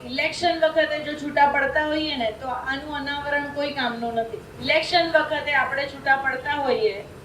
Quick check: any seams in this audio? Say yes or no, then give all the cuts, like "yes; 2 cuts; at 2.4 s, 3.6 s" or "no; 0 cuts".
yes; 1 cut; at 4.5 s